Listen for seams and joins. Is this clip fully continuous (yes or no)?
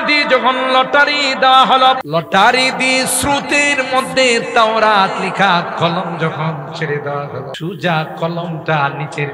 no